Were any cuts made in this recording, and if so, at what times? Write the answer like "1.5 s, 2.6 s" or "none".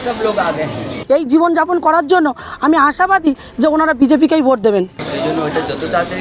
0.9 s, 5.0 s